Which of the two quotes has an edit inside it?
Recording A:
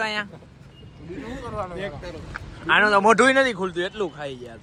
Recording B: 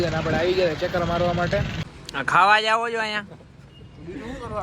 B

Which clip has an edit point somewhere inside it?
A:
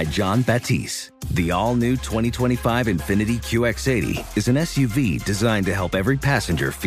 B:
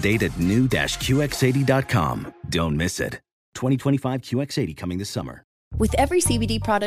B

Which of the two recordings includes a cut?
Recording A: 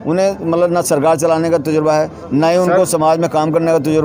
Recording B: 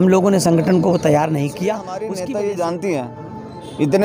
B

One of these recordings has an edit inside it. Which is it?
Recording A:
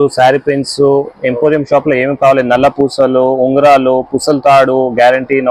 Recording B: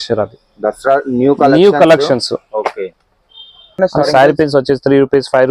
B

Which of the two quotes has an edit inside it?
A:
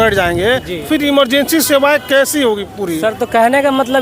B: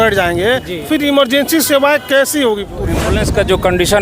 B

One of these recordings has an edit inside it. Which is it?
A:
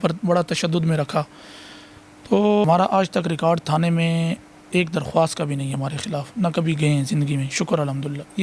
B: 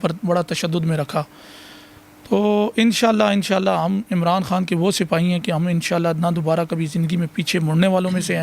A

